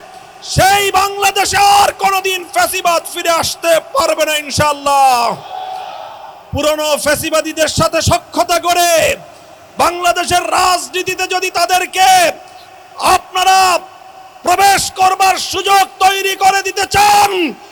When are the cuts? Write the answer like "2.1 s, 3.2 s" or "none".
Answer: none